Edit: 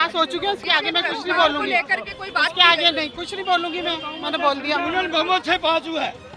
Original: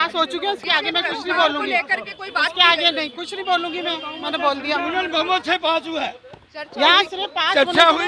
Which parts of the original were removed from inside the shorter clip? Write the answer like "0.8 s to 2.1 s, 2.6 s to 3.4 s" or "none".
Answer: none